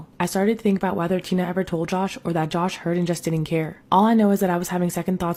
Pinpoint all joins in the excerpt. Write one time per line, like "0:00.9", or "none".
none